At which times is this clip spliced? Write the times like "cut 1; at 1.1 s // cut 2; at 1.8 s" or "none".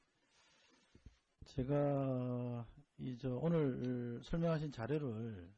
none